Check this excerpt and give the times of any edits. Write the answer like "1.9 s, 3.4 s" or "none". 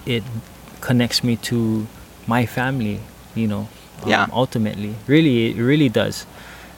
2.0 s